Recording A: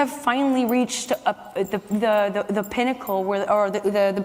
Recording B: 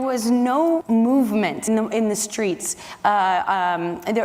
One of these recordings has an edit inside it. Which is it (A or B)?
B